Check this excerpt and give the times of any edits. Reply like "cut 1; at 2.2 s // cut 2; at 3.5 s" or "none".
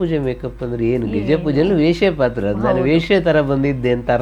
none